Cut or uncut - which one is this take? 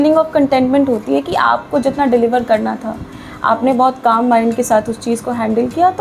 uncut